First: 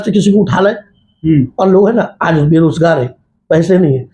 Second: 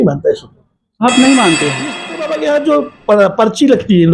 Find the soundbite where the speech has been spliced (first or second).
second